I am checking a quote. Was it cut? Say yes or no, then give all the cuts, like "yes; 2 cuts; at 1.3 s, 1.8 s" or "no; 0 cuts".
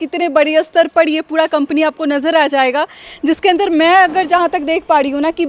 no; 0 cuts